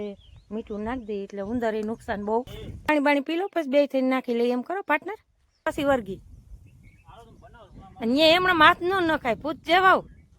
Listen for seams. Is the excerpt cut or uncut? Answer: cut